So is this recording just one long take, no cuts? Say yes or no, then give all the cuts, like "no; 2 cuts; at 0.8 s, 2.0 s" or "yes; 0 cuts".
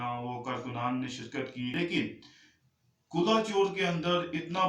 no; 1 cut; at 1.8 s